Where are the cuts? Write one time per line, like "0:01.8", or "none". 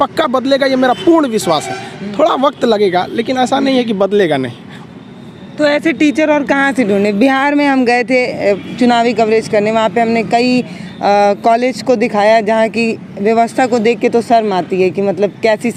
none